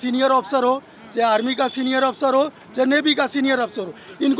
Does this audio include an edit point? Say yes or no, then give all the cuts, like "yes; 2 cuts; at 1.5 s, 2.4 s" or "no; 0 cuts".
no; 0 cuts